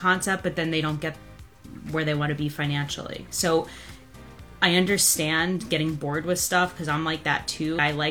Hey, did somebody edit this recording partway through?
no; 0 cuts

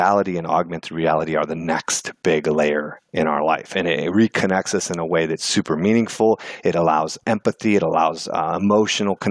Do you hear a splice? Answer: yes; 1 cut; at 7.2 s

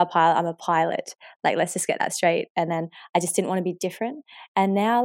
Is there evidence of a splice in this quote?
no; 0 cuts

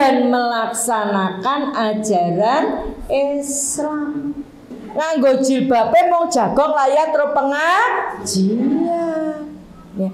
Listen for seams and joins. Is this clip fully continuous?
no; 1 cut; at 4.7 s

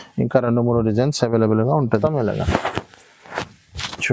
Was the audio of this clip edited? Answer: yes; 1 cut; at 2.0 s

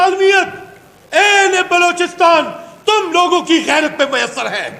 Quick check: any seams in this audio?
no; 0 cuts

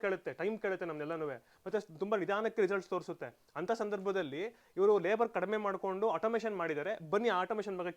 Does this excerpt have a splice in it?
no; 0 cuts

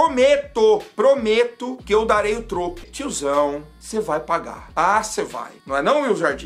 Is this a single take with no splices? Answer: no; 1 cut; at 2.9 s

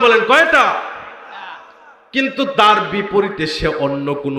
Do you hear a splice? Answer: no; 0 cuts

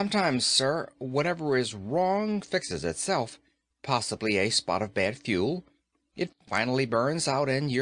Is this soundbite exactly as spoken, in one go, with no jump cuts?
no; 1 cut; at 3.5 s

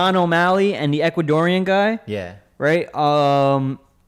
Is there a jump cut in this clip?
no; 0 cuts

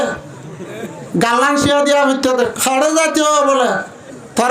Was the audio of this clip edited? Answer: yes; 1 cut; at 2.5 s

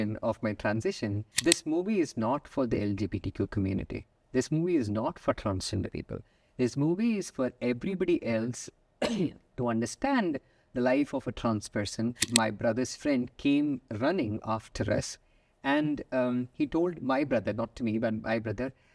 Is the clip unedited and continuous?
no; 2 cuts; at 1.3 s, 12.3 s

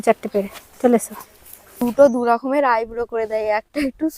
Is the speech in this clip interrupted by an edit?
yes; 1 cut; at 1.8 s

